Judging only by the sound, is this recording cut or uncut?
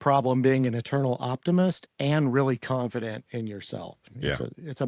uncut